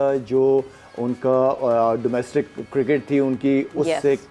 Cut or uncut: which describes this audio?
uncut